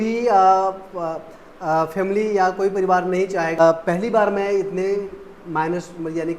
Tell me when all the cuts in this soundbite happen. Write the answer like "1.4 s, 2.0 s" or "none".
3.6 s